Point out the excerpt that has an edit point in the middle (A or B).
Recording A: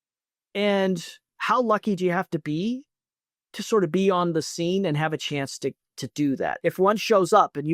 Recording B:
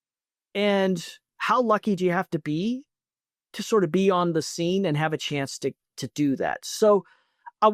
A